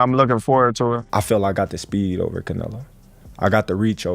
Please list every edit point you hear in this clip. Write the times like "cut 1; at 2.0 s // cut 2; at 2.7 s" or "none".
cut 1; at 1.0 s